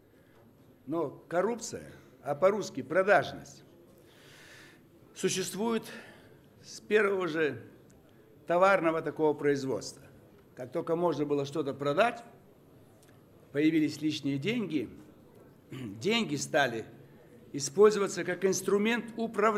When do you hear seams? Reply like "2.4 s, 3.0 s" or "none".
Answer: none